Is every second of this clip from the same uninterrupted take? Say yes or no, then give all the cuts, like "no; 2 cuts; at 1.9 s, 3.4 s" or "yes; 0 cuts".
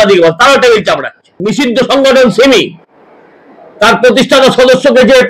no; 1 cut; at 1.4 s